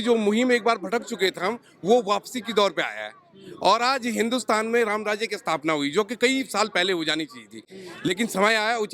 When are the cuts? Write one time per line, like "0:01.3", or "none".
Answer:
none